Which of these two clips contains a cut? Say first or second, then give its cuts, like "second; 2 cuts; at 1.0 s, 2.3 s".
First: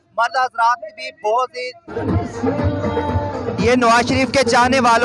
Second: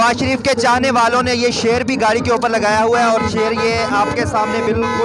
first; 1 cut; at 2.0 s